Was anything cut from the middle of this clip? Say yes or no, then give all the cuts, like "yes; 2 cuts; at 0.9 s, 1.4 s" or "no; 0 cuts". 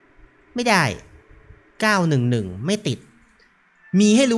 no; 0 cuts